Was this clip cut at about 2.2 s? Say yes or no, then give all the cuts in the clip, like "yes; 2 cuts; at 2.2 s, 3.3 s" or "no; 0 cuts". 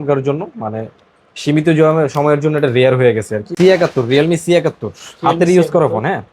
no; 1 cut; at 3.4 s